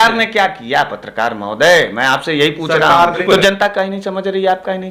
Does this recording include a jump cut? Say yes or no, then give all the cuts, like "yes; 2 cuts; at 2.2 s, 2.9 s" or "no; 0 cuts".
yes; 1 cut; at 3.2 s